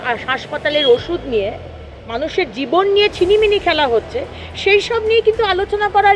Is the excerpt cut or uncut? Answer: uncut